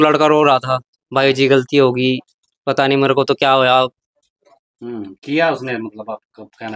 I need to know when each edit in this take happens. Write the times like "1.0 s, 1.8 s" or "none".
none